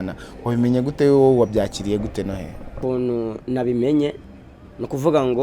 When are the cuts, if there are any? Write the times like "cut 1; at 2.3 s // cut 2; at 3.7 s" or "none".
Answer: cut 1; at 2.7 s